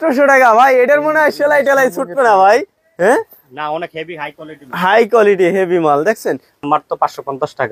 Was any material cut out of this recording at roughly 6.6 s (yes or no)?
yes